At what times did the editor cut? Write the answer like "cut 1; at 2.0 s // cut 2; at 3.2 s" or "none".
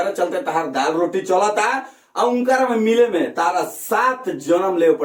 none